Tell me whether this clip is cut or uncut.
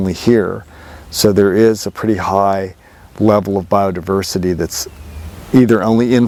uncut